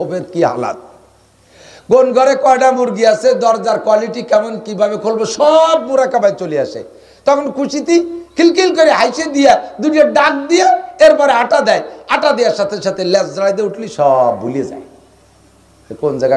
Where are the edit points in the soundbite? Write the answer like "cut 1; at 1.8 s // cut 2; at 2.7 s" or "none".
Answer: none

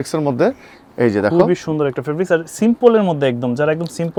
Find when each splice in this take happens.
none

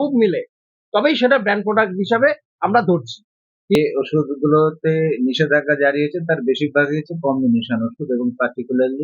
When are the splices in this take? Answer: cut 1; at 3.8 s

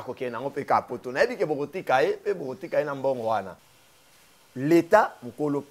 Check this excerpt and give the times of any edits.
cut 1; at 3.6 s

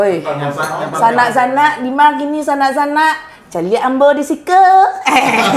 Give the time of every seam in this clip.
none

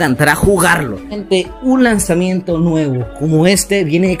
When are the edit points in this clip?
cut 1; at 1.1 s

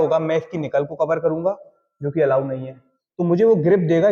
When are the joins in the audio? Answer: none

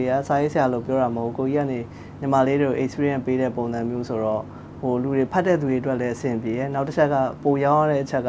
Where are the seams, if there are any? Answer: none

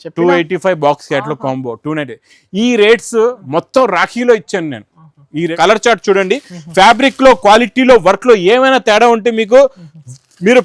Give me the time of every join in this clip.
cut 1; at 5.5 s

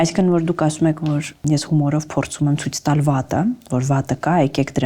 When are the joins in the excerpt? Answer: cut 1; at 1.4 s

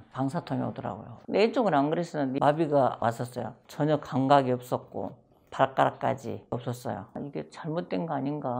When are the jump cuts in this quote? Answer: cut 1; at 2.4 s // cut 2; at 3.0 s // cut 3; at 7.2 s

